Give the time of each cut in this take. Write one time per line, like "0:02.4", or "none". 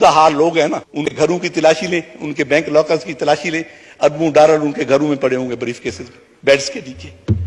0:01.1